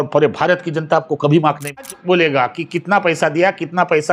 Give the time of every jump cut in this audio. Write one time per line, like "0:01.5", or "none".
0:01.8